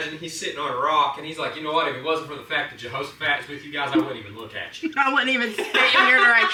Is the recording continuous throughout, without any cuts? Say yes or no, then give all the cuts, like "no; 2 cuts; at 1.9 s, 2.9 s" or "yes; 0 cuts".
yes; 0 cuts